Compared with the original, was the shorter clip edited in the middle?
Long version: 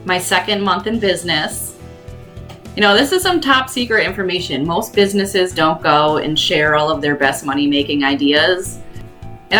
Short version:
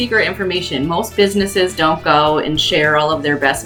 no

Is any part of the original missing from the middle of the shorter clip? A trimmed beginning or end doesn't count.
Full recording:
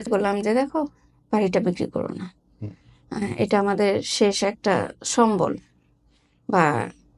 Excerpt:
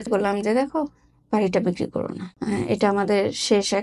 yes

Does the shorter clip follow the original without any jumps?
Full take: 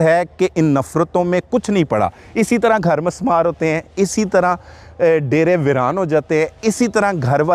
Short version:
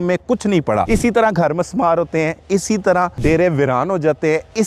no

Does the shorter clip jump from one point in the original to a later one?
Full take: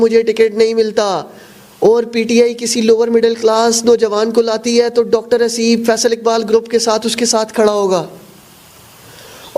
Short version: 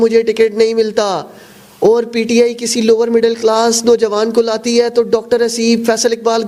no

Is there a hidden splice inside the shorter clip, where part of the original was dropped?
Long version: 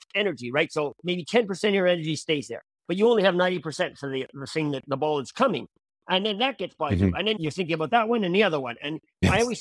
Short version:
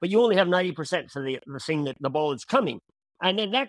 no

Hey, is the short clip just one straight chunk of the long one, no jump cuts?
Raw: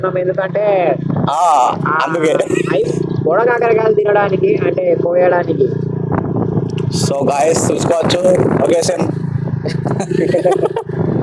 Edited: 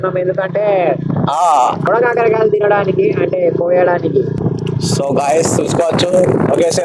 no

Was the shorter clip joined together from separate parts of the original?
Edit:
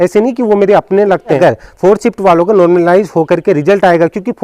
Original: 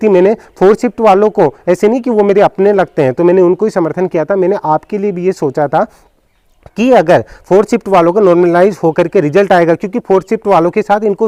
yes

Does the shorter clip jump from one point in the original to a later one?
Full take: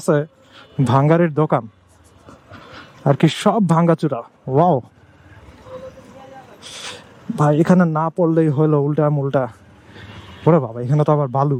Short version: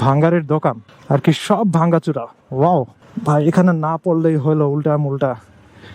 yes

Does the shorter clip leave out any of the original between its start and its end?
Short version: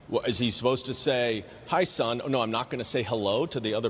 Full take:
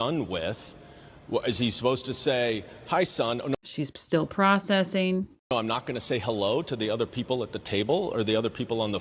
yes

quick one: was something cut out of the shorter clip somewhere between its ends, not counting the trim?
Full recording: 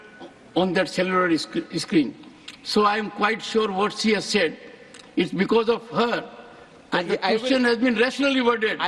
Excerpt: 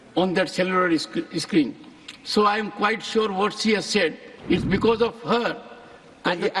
yes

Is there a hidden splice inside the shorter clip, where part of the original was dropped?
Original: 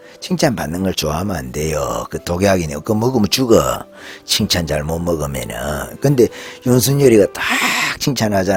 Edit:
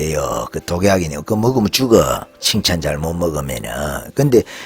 yes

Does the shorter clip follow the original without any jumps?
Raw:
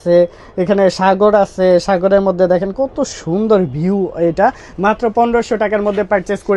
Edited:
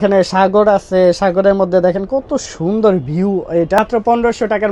no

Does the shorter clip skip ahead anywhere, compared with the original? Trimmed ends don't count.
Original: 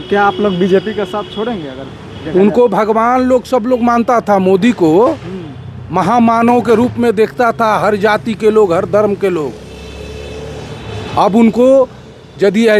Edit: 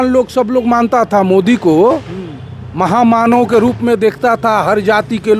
no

